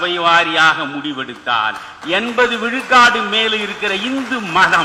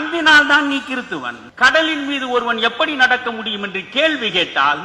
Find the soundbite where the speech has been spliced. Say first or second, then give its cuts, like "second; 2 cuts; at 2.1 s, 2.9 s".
second; 1 cut; at 1.4 s